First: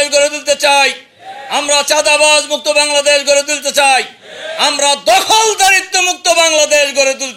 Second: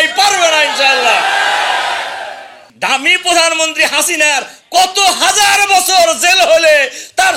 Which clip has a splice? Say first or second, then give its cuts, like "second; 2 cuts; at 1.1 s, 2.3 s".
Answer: second; 1 cut; at 2.6 s